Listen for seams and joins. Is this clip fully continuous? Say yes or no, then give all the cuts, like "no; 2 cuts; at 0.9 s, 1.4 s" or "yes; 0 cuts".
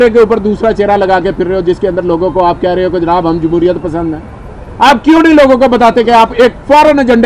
yes; 0 cuts